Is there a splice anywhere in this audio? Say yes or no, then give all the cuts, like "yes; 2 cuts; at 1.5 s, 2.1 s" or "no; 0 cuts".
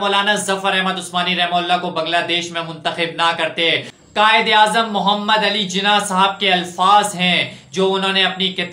yes; 1 cut; at 4.0 s